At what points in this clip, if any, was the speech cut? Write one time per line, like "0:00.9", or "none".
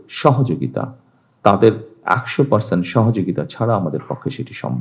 none